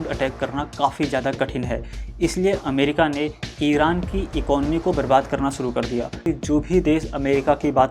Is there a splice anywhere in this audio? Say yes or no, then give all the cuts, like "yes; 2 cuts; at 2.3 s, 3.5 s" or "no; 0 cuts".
yes; 1 cut; at 6.2 s